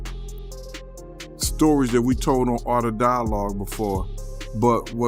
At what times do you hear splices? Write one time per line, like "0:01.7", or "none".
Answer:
none